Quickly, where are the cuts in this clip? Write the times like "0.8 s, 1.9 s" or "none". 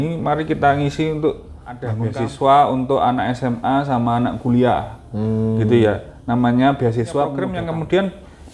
2.0 s, 7.4 s